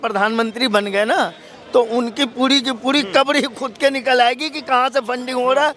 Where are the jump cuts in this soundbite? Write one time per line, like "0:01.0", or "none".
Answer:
none